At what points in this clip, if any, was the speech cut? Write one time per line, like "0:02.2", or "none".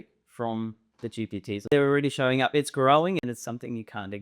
0:01.7
0:03.2